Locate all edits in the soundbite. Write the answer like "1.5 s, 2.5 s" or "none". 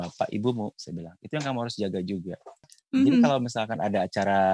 2.7 s